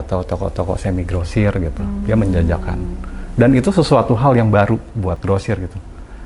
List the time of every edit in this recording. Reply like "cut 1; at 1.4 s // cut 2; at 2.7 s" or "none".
cut 1; at 5.2 s